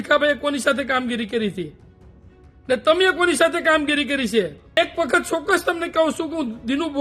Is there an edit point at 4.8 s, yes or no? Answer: yes